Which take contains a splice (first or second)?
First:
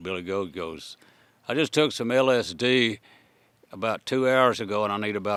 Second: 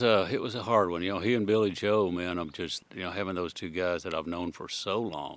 second